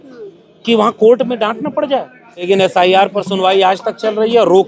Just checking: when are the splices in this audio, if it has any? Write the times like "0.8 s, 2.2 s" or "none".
2.5 s